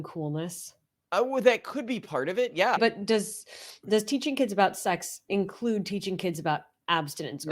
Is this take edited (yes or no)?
yes